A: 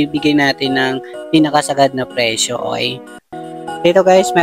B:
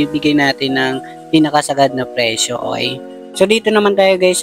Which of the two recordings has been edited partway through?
B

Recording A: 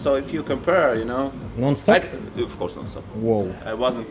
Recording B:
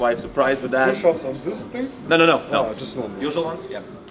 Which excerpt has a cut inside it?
A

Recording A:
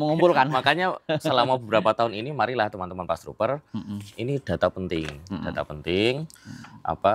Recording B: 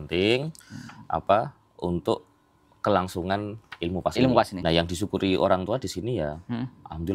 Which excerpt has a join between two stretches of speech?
B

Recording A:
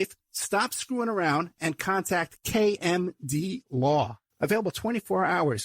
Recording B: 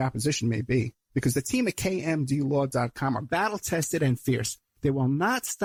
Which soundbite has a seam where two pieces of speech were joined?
A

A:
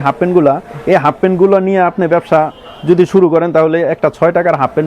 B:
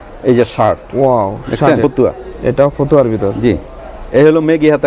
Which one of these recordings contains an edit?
B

